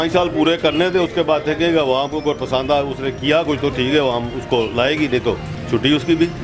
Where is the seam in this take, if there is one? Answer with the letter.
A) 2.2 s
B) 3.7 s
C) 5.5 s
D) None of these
C